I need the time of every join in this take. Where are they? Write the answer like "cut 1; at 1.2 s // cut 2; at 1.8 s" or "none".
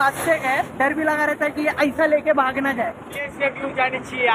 cut 1; at 3.2 s